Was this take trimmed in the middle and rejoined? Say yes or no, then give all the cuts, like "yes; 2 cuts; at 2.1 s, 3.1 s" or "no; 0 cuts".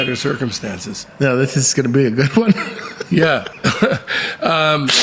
yes; 1 cut; at 1.0 s